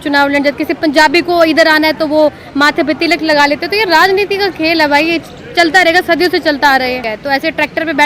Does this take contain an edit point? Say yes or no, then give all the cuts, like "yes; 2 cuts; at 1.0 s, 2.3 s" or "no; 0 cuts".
yes; 1 cut; at 7.1 s